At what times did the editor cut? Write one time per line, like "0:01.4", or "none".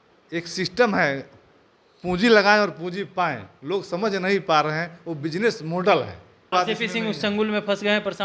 0:06.5